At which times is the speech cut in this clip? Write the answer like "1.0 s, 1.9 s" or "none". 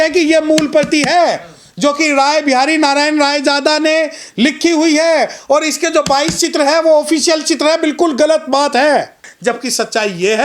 9.3 s